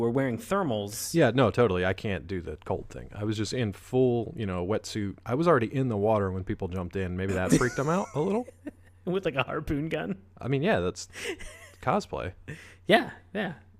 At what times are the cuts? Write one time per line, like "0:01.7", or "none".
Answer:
0:04.3

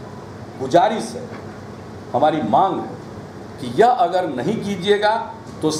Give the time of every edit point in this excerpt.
none

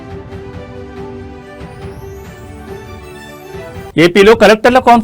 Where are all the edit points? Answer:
0:03.9

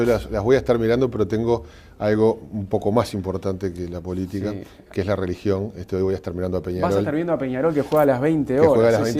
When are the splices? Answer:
0:01.1

